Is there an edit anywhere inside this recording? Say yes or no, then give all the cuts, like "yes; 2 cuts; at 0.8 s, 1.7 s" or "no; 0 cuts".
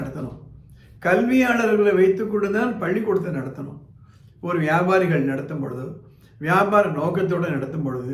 no; 0 cuts